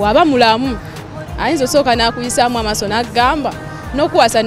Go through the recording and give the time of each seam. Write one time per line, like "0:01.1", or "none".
none